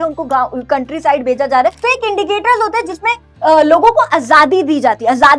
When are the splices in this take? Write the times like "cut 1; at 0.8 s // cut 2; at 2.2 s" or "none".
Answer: cut 1; at 1.8 s